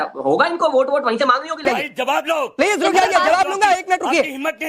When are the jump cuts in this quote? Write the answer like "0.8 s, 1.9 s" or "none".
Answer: 1.6 s